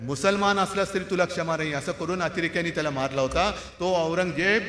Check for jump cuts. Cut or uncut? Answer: uncut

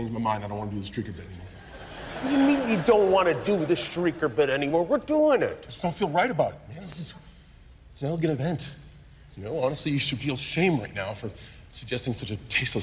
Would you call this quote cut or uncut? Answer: uncut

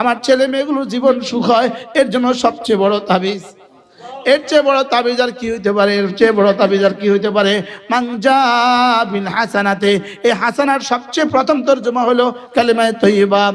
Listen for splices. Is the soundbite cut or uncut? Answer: uncut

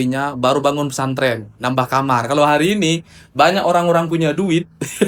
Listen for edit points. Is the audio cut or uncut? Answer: uncut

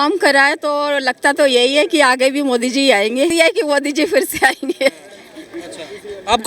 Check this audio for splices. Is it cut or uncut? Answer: cut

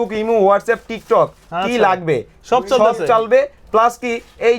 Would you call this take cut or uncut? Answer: uncut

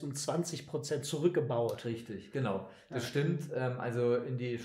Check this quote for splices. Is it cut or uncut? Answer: uncut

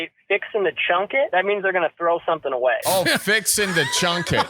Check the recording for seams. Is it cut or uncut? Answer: cut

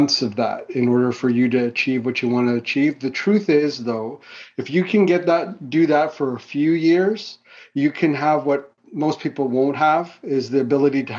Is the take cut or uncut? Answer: uncut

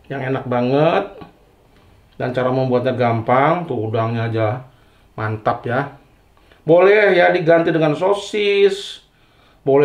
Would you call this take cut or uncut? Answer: uncut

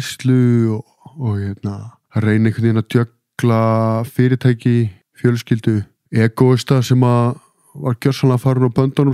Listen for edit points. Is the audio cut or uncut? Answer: cut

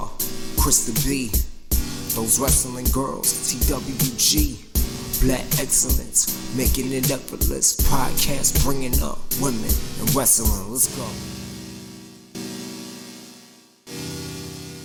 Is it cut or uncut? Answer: uncut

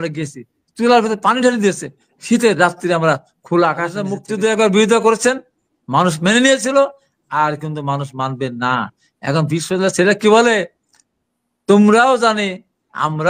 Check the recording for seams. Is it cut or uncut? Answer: cut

